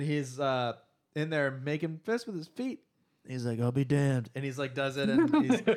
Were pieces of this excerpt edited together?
no; 0 cuts

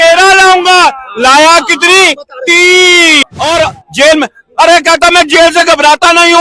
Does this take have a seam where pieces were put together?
yes; 1 cut; at 3.2 s

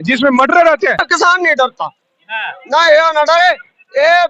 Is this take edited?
yes; 1 cut; at 1.1 s

